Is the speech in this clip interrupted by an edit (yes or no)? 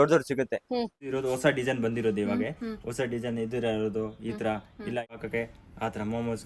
yes